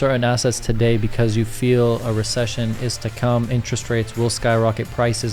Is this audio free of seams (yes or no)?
yes